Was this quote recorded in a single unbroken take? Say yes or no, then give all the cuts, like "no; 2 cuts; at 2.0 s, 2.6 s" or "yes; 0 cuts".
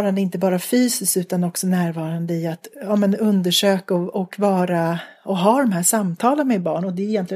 yes; 0 cuts